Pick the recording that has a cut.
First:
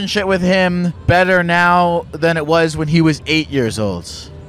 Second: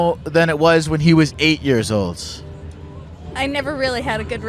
first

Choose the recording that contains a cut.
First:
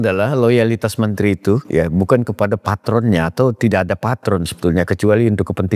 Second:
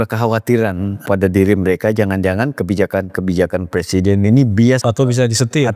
second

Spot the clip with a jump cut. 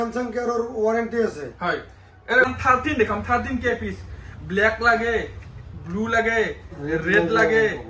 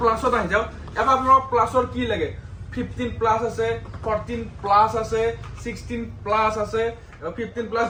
first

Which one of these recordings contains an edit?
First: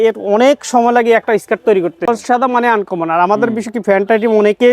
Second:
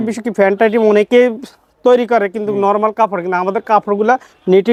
first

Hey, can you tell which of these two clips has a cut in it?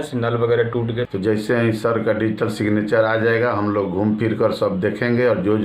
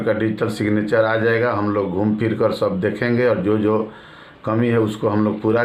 first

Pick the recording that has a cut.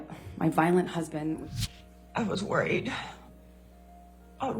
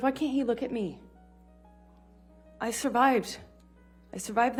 first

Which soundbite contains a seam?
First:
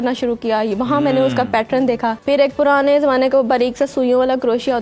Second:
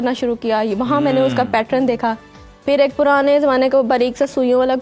first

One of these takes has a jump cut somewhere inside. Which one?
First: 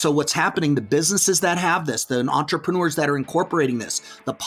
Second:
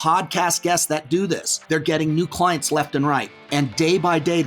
second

